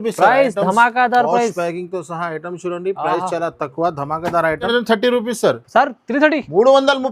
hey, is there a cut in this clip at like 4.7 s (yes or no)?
yes